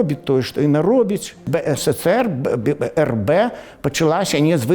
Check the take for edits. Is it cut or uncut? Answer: cut